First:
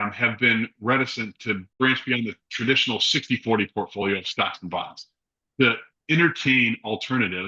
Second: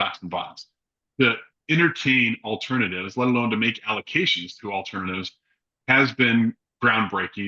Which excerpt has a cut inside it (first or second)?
first